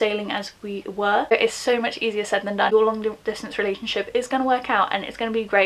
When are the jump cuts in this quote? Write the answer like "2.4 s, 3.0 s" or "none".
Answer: 1.3 s, 2.7 s